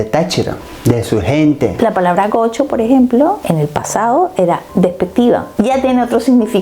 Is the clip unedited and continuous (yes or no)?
no